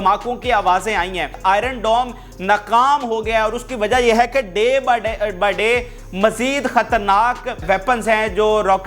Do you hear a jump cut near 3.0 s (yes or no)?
no